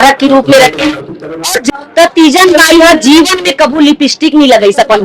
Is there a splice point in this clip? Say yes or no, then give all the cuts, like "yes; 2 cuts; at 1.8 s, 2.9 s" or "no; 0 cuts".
yes; 1 cut; at 1.7 s